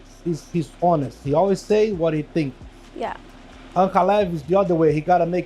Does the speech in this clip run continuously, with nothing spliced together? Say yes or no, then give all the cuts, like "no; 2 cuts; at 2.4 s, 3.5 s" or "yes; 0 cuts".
yes; 0 cuts